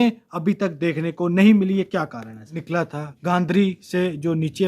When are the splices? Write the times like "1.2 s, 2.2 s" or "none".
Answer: 2.6 s